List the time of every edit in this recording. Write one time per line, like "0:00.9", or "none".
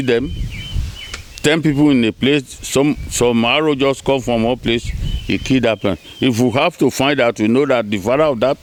none